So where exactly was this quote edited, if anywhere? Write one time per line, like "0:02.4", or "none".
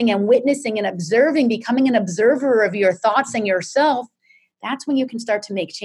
none